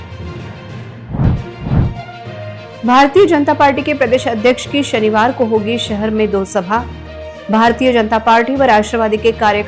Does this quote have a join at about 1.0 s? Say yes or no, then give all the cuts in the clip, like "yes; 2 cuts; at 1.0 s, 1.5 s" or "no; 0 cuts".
yes; 1 cut; at 1.0 s